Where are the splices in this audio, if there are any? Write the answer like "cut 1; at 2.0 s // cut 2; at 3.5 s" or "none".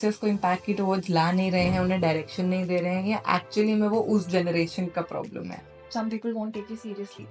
cut 1; at 5.8 s